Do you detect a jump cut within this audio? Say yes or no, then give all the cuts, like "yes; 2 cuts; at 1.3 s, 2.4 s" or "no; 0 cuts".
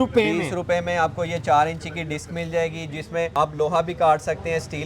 yes; 1 cut; at 3.3 s